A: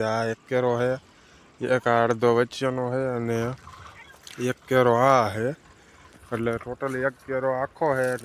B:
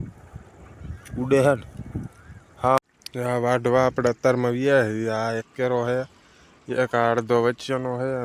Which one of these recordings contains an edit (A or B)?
B